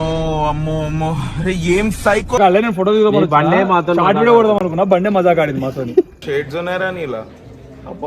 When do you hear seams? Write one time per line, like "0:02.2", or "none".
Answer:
0:02.4